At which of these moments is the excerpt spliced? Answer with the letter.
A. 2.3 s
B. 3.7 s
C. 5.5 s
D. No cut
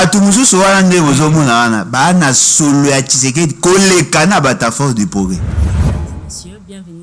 C